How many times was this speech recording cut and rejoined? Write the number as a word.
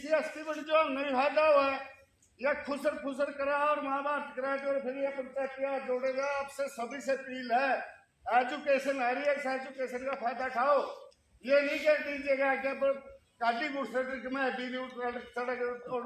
zero